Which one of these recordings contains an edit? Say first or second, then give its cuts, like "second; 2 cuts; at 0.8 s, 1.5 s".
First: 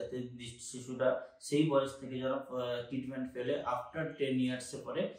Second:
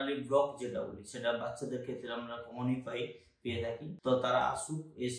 second; 1 cut; at 3.9 s